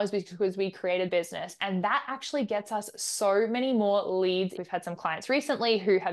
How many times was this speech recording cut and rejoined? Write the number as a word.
two